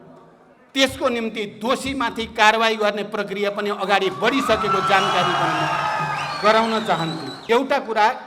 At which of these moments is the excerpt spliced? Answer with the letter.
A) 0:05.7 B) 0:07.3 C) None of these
B